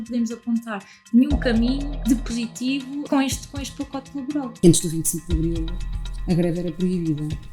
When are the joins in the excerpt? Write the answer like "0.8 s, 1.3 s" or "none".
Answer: 2.0 s, 3.1 s, 4.5 s